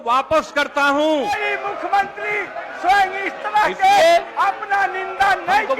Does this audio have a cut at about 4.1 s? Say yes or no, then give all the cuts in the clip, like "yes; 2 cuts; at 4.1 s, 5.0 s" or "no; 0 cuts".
no; 1 cut; at 1.4 s